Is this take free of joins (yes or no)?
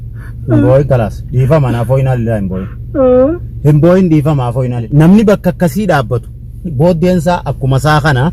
no